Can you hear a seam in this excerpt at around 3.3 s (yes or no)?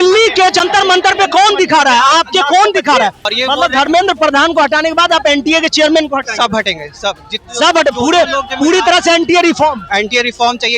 yes